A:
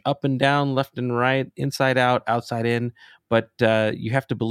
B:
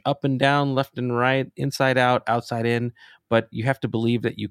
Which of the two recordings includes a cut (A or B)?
B